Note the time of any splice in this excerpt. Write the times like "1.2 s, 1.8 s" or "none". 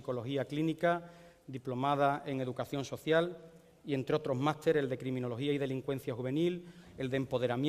none